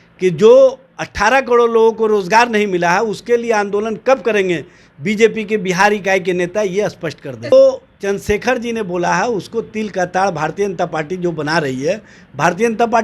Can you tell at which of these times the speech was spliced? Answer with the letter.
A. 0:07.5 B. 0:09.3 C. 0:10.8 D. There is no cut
A